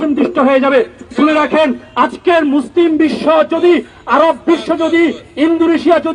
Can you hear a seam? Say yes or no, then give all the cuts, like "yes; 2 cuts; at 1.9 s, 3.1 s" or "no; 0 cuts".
no; 0 cuts